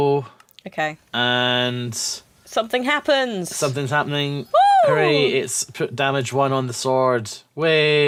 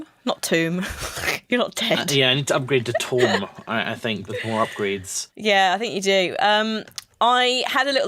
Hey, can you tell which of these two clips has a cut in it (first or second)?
second